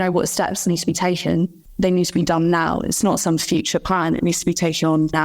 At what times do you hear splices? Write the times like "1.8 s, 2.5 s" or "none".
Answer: 1.6 s

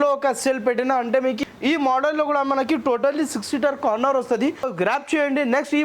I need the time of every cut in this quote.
1.4 s, 4.7 s

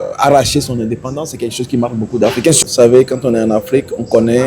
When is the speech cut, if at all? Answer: 2.6 s

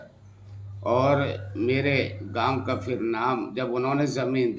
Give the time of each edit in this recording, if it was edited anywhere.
none

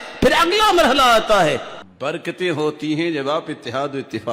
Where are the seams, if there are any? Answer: 1.8 s

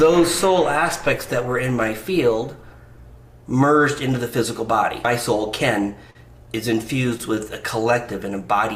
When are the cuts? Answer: 5.0 s

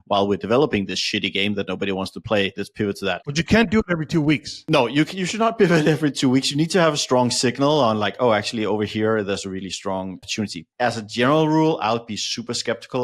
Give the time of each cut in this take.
3.0 s, 4.5 s, 10.6 s

